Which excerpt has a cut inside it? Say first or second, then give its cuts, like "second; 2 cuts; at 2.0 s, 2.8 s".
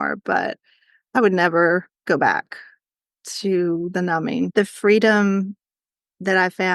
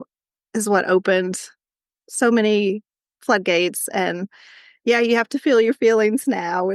first; 1 cut; at 4.5 s